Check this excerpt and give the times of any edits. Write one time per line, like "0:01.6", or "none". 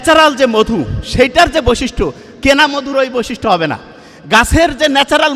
none